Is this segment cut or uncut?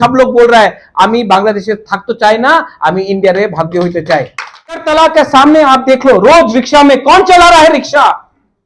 cut